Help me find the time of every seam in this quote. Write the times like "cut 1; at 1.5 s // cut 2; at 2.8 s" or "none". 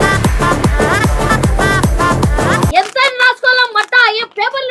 cut 1; at 2.7 s